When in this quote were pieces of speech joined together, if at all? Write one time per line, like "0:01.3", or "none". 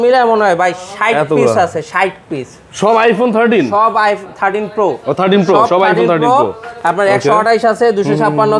none